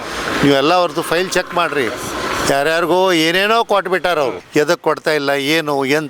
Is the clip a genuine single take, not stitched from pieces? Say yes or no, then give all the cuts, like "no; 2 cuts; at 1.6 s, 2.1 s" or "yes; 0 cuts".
no; 1 cut; at 4.4 s